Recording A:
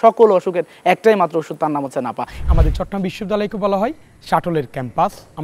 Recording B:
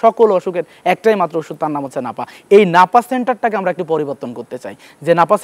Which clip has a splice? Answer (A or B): A